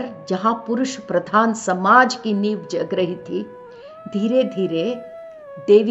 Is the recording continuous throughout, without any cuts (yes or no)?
yes